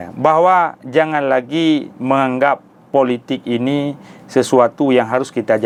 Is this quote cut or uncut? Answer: uncut